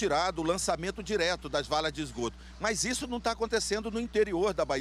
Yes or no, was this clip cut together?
no